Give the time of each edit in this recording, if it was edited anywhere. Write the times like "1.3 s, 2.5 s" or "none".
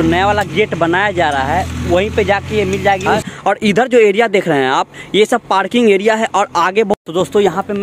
3.2 s, 6.9 s